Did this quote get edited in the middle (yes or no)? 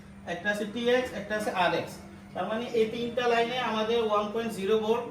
no